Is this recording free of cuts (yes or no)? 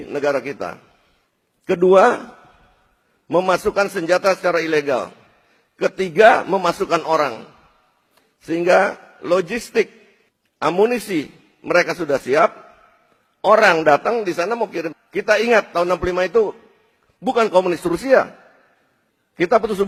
yes